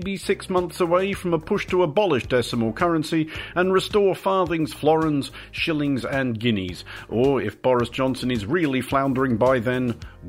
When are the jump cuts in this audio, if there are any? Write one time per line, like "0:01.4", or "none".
none